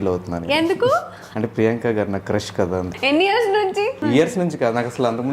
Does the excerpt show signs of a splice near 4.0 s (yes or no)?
yes